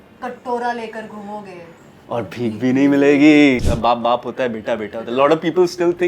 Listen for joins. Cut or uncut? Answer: cut